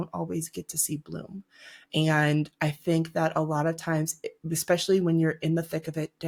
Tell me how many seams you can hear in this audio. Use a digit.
0